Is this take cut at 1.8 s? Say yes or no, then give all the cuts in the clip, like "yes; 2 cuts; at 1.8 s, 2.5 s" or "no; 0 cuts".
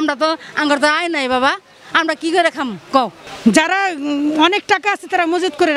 no; 1 cut; at 3.2 s